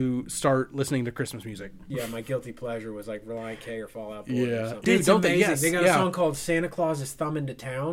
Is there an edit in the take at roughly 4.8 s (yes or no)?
yes